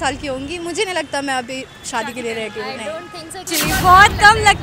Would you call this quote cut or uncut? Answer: cut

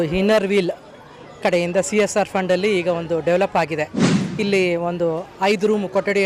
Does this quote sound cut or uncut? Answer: uncut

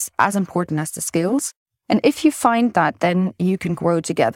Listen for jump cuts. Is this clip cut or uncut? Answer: uncut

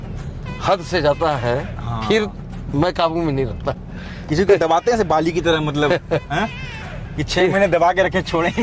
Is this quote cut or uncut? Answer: cut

